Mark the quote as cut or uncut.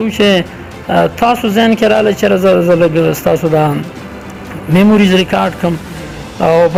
uncut